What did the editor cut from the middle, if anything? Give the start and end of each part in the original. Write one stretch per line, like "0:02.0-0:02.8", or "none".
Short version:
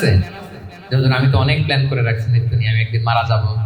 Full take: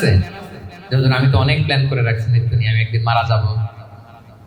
none